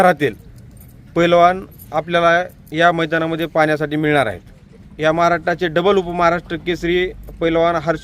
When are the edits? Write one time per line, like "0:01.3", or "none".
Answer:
0:04.8